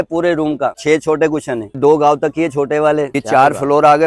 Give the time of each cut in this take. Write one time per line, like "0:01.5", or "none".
0:00.8
0:01.8
0:03.1